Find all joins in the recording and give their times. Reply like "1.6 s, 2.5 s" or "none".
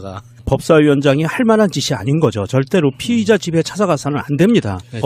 4.0 s